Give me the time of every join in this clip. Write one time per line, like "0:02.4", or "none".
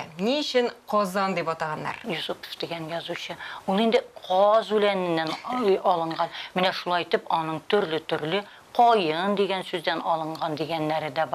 0:02.0